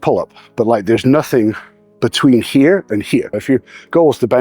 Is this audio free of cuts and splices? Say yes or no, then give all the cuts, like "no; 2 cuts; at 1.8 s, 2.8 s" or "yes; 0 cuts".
no; 1 cut; at 3.4 s